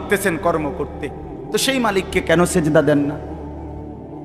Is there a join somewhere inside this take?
yes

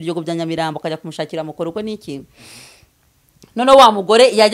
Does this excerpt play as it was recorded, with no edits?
yes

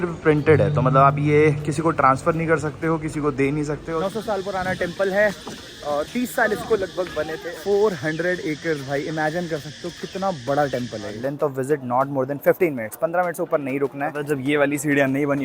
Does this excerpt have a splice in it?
yes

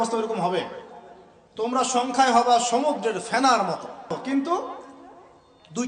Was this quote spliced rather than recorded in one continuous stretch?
yes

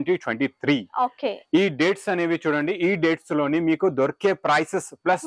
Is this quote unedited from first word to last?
yes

